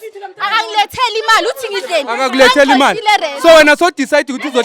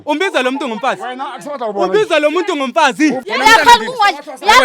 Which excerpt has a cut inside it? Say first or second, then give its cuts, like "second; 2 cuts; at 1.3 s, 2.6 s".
second; 1 cut; at 3.2 s